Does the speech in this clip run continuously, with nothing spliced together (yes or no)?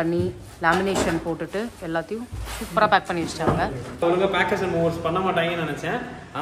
no